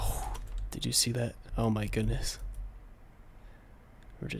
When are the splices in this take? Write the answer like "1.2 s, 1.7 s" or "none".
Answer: 1.4 s